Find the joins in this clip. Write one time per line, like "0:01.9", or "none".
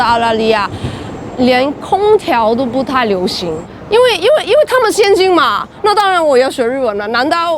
0:03.7